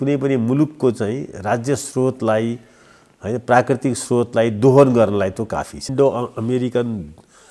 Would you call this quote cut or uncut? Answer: cut